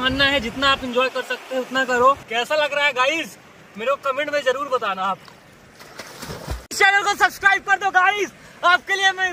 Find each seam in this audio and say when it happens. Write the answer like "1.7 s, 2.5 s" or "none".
2.2 s, 6.6 s